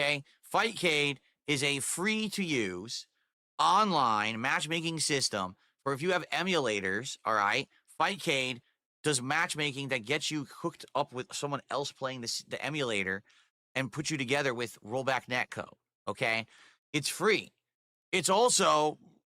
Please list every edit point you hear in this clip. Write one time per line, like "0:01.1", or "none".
none